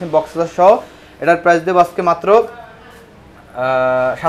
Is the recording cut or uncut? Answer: uncut